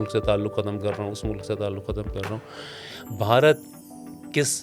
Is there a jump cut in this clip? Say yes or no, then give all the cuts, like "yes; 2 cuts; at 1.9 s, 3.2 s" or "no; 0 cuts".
no; 0 cuts